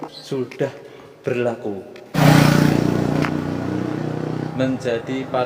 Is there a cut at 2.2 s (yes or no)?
yes